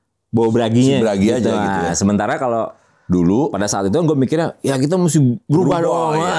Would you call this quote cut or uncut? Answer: uncut